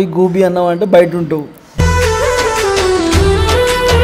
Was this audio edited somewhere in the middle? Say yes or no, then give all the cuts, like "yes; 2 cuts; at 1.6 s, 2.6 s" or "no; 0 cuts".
yes; 1 cut; at 1.6 s